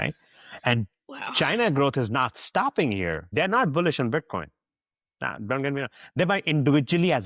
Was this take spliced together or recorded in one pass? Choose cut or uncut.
cut